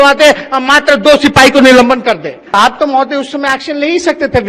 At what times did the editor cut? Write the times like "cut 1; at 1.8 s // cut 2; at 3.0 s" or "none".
cut 1; at 2.4 s